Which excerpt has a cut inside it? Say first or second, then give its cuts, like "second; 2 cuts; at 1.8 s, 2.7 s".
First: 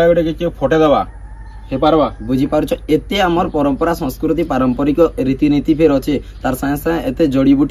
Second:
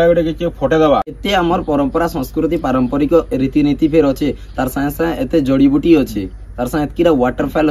second; 1 cut; at 1.2 s